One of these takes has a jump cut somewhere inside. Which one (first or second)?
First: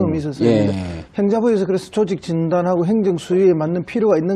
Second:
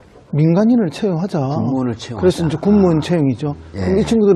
first